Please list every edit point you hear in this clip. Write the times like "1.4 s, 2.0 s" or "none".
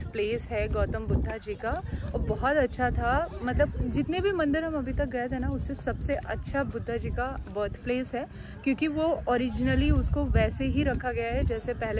none